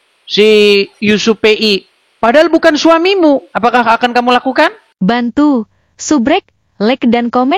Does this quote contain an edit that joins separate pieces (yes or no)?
yes